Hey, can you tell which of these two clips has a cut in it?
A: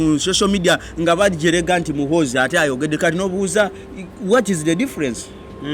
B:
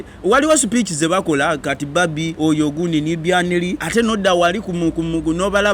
B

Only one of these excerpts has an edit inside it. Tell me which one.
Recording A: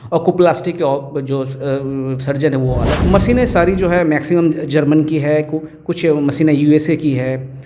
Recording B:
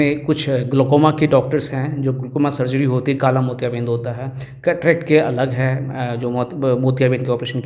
A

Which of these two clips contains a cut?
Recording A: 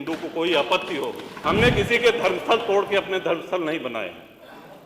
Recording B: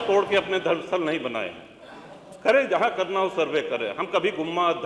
A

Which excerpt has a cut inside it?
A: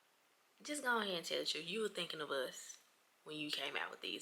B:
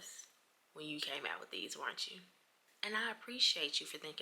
B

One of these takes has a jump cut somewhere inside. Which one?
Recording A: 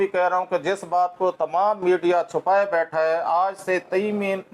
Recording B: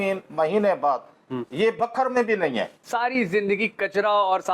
B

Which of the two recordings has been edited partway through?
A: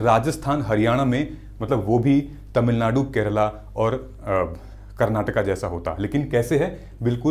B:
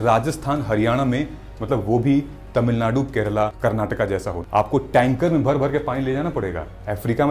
B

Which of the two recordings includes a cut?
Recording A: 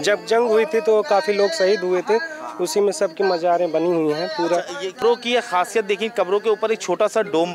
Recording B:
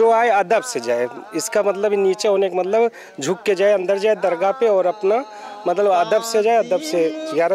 A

